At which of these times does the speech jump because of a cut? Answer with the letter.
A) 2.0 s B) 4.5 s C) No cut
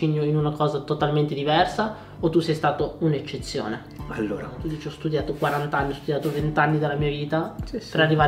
B